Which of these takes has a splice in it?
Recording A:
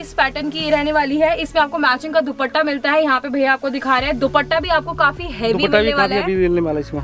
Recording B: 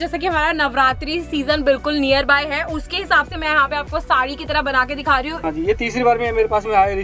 B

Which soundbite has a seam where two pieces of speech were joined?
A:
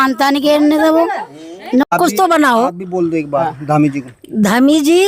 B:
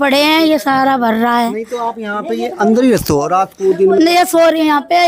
A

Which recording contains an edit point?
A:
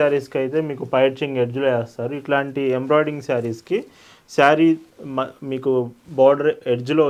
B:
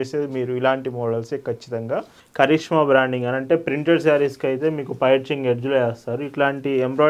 B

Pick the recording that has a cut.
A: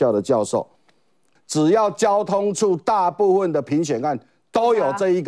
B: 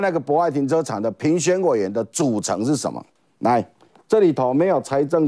A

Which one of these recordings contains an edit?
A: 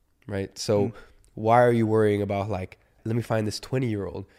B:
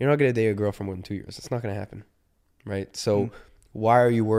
A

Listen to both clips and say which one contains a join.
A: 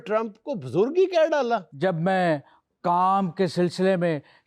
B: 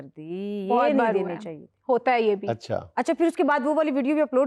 A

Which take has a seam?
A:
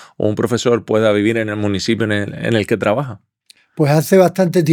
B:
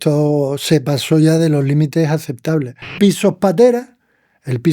B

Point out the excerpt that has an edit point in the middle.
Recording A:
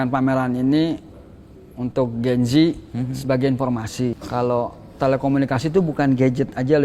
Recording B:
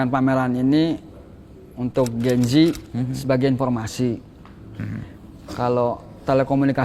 A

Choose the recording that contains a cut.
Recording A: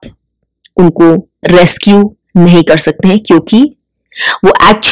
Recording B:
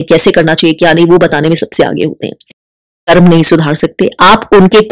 B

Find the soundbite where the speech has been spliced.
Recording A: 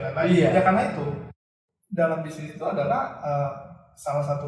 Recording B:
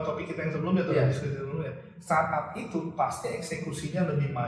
A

